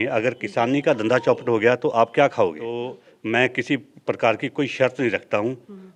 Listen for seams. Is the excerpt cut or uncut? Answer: cut